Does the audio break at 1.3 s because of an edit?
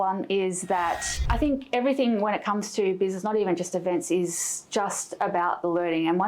yes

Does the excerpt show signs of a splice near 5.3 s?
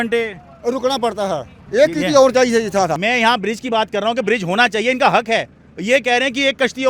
no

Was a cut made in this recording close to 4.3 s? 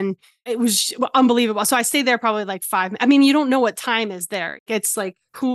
yes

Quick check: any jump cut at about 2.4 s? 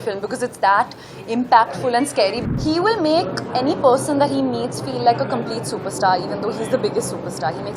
yes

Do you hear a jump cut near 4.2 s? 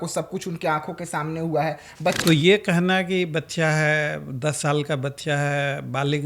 no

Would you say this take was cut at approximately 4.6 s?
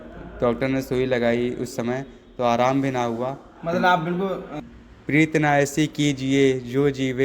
yes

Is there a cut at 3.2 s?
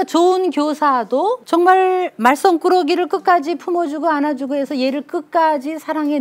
no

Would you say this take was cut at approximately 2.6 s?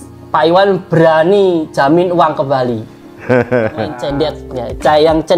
no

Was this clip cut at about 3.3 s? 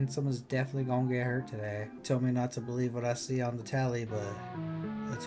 no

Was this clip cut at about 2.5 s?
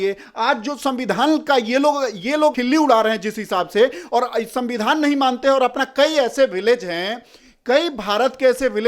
yes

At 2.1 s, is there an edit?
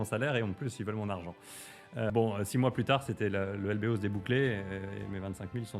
yes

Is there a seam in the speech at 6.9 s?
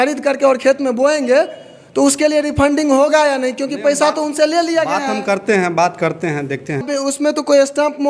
yes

